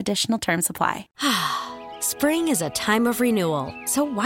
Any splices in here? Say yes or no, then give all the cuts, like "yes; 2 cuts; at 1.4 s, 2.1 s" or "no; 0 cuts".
yes; 1 cut; at 1.1 s